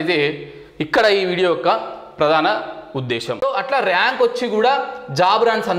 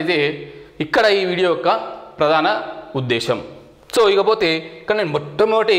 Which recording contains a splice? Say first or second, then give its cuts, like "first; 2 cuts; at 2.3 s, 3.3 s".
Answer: first; 1 cut; at 3.4 s